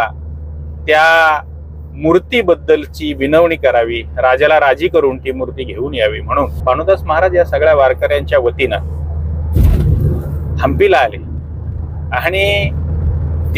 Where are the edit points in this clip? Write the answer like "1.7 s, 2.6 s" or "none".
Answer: 6.6 s

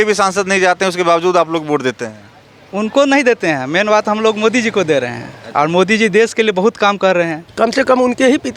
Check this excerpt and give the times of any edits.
7.4 s

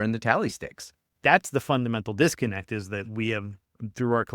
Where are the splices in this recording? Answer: 1.2 s

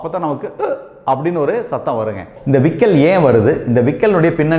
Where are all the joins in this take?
2.3 s

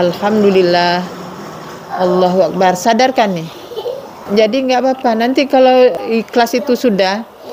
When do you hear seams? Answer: 4.1 s, 6.0 s

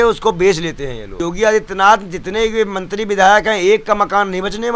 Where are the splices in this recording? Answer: 1.0 s

